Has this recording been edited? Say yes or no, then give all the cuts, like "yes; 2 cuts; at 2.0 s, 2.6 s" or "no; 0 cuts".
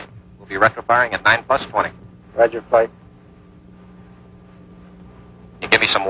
no; 0 cuts